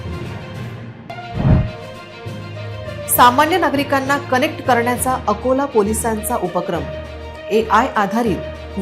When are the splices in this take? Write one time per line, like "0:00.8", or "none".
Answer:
0:01.0